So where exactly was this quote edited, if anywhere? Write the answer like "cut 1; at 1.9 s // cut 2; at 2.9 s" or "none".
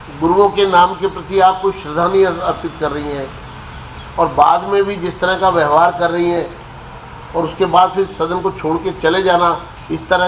none